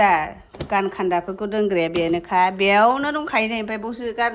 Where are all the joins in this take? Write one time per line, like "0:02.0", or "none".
none